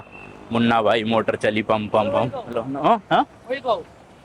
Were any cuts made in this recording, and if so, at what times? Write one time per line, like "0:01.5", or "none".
none